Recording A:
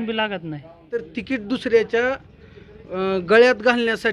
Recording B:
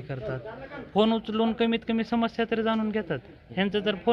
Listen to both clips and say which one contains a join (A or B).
A